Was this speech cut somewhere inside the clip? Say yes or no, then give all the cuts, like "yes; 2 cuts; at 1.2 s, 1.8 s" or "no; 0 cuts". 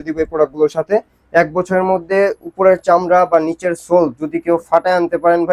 no; 0 cuts